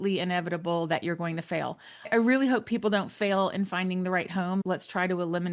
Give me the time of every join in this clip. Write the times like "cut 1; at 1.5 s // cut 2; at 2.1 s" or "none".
cut 1; at 2.1 s // cut 2; at 4.6 s